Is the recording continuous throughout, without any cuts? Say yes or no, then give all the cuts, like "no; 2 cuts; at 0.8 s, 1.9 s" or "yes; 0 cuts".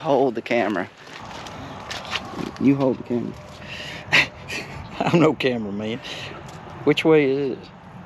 no; 1 cut; at 1.4 s